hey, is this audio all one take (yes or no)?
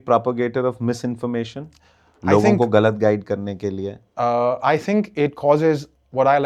yes